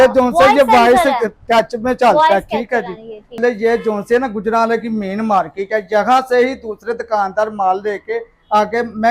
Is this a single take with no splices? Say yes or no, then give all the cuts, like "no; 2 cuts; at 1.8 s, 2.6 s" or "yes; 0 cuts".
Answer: no; 1 cut; at 3.4 s